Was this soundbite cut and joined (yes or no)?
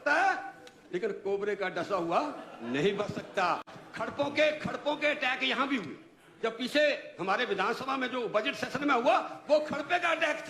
no